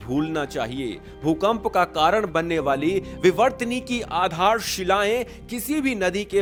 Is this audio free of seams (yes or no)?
yes